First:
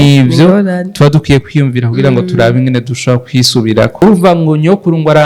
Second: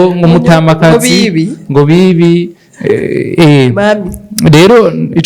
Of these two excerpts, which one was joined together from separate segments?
first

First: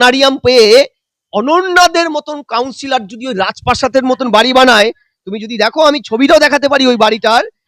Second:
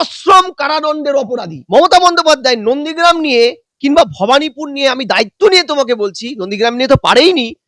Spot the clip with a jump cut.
second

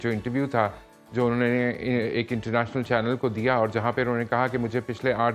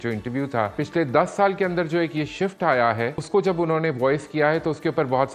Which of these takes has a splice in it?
second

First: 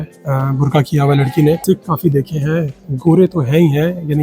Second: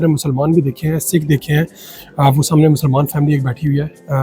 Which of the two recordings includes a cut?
first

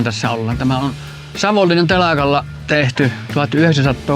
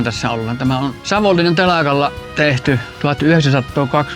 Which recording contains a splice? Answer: second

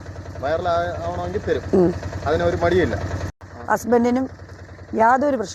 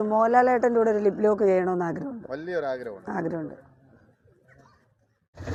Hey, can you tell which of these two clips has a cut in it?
first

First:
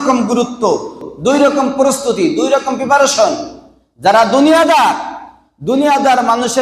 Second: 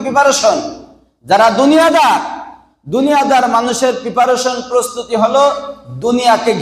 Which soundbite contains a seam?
first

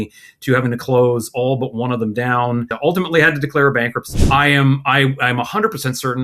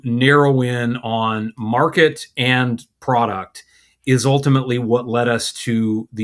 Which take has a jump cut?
first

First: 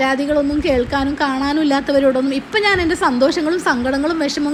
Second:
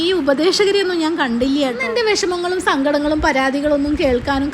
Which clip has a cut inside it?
second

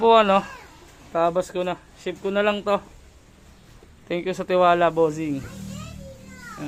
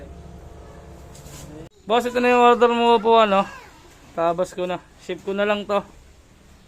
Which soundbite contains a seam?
second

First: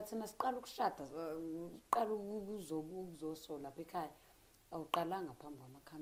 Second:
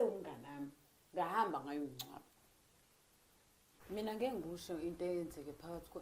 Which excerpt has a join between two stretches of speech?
second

